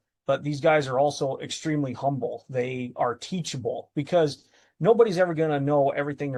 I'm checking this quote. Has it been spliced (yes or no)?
no